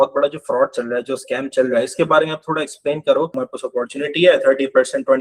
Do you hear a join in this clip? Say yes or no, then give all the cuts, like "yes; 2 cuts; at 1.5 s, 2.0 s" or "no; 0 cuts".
yes; 1 cut; at 3.3 s